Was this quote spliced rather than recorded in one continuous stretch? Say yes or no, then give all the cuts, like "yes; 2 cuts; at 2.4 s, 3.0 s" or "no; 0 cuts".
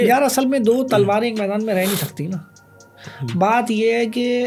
no; 0 cuts